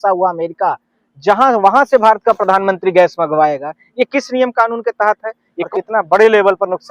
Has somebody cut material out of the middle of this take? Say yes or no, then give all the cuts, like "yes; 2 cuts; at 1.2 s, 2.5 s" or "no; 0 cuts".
yes; 1 cut; at 5.7 s